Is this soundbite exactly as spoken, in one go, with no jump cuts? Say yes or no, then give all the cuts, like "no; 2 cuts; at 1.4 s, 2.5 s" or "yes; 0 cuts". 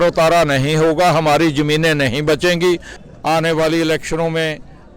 no; 1 cut; at 2.9 s